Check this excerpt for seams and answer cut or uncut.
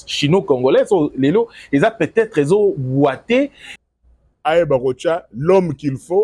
cut